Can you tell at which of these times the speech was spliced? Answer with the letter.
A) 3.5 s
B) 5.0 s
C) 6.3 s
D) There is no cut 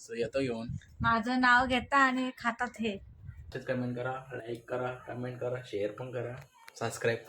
A